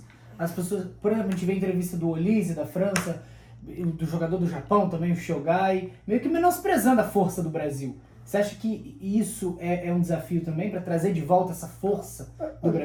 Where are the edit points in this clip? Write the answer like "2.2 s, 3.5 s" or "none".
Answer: none